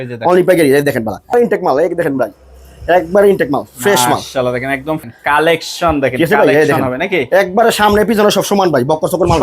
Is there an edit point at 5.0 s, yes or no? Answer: yes